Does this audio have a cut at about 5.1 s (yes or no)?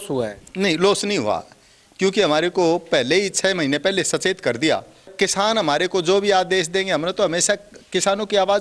yes